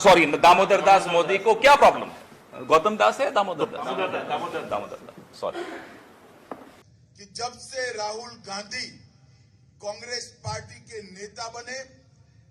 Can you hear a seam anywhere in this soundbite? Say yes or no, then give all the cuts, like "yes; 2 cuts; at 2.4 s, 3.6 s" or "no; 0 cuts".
yes; 1 cut; at 6.7 s